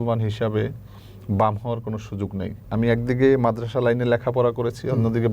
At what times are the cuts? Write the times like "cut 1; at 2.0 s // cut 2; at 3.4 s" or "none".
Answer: cut 1; at 2.6 s